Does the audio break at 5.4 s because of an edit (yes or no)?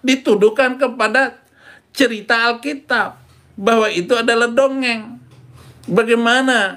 yes